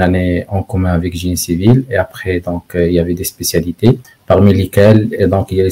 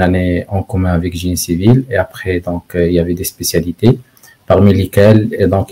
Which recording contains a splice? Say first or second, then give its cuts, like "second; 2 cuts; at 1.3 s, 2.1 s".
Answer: first; 1 cut; at 4.1 s